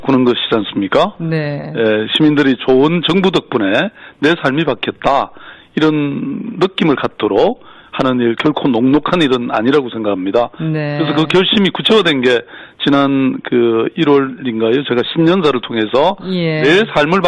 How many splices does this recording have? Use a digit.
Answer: 1